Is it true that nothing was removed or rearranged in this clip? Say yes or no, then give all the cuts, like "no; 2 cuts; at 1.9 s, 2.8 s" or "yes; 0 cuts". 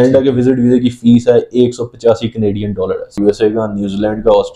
no; 1 cut; at 3.1 s